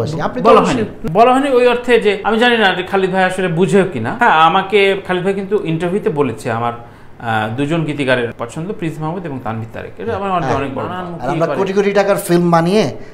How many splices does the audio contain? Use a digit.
5